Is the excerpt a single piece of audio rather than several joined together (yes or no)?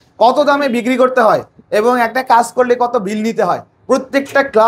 yes